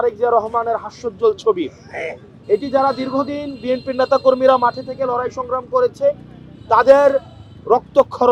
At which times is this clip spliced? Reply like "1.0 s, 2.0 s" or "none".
none